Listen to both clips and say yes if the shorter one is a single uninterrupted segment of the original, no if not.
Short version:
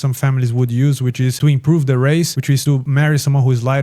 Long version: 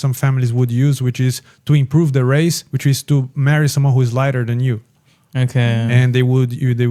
no